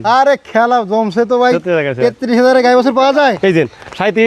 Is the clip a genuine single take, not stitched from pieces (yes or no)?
no